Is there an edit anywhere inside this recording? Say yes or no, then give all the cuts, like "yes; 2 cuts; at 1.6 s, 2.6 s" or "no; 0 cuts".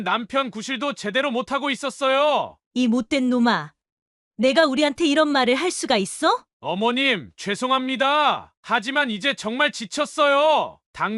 yes; 1 cut; at 2.6 s